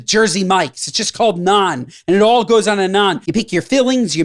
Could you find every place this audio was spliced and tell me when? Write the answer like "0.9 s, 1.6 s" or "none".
3.2 s